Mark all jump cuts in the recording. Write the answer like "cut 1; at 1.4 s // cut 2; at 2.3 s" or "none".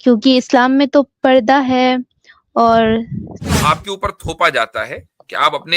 cut 1; at 3.4 s